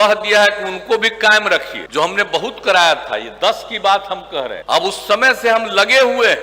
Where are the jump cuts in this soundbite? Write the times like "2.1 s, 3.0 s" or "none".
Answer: 1.8 s, 4.6 s